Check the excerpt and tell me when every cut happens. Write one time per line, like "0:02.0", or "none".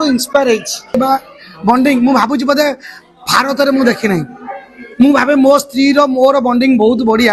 0:00.9